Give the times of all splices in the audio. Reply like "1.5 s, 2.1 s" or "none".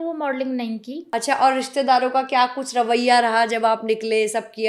1.0 s